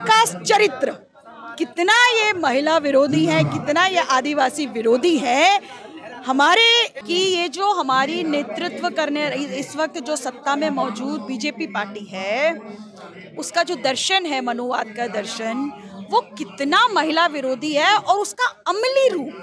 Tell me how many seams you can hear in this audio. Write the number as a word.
one